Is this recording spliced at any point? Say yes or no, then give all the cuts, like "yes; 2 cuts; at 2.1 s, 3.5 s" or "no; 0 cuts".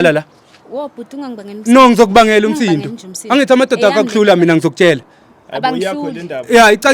no; 0 cuts